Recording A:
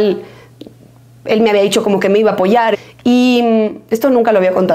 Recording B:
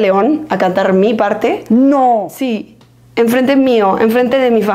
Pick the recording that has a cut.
A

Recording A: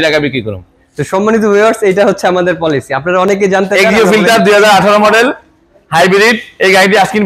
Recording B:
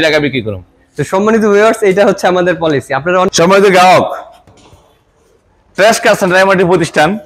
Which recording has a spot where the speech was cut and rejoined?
B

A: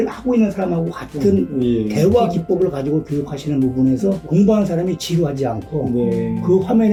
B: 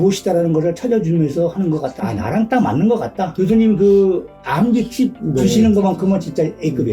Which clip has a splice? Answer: B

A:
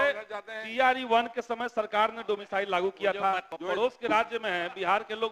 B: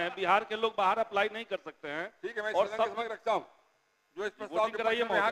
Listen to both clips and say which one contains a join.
A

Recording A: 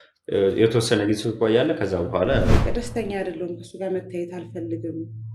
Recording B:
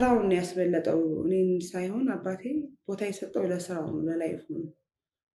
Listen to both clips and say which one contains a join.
A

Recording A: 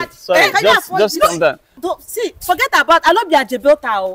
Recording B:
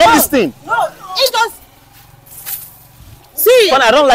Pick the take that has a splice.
A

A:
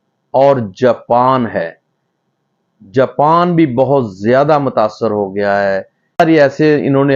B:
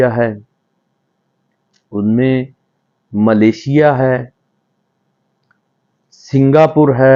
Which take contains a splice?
A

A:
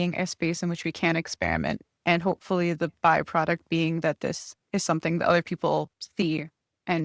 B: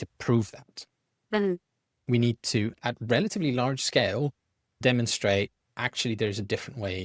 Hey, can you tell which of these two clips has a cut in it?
A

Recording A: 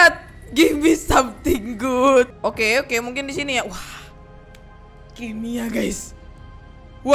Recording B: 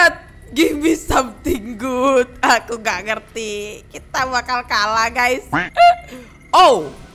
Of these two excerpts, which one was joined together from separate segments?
A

